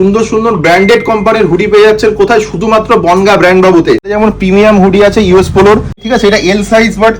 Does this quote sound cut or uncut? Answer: cut